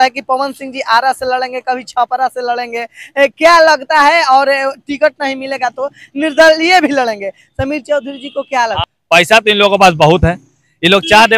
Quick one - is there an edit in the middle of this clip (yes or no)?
yes